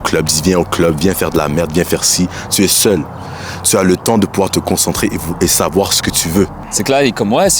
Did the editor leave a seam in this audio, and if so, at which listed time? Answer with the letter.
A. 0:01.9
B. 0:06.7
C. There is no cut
B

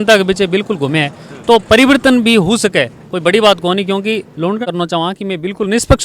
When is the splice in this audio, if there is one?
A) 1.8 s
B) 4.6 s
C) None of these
B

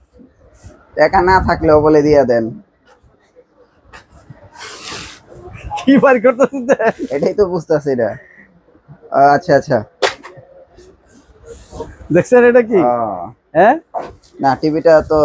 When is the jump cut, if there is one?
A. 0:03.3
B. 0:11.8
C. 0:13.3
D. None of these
D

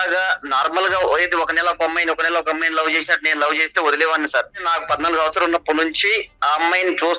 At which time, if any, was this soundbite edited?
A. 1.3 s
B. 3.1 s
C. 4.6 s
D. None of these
C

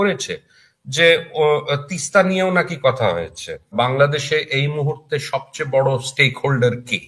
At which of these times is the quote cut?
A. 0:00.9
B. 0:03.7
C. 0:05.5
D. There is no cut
B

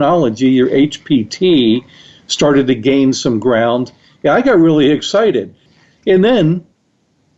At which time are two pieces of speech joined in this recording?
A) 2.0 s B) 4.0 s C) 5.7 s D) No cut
C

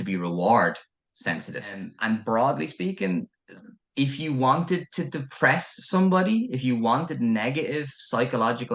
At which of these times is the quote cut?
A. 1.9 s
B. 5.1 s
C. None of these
A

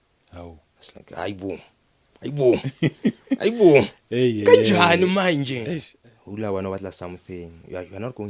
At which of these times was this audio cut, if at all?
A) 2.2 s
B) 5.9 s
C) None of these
B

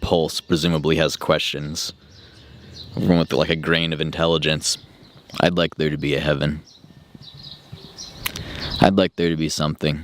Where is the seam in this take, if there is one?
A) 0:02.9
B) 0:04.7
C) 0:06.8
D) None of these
B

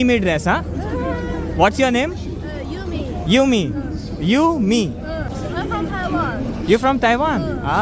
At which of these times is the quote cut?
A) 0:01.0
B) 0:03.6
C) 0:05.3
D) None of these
D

